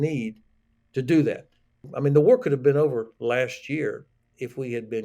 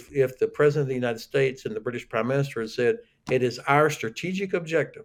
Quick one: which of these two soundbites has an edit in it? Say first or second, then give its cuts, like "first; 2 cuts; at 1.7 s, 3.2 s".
first; 1 cut; at 1.9 s